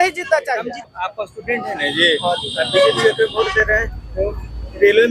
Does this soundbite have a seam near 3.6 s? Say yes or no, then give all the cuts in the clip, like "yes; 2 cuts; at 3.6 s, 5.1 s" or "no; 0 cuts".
no; 1 cut; at 0.9 s